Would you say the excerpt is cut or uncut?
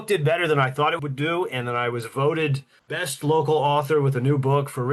cut